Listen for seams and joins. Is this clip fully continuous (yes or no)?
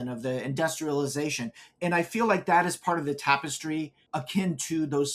no